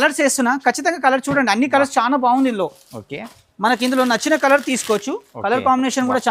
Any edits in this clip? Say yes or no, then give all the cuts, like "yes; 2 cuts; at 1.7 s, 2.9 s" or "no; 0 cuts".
no; 0 cuts